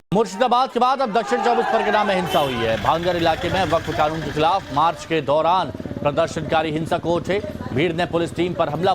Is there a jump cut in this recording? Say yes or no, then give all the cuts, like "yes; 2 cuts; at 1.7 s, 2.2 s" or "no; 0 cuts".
yes; 1 cut; at 4.2 s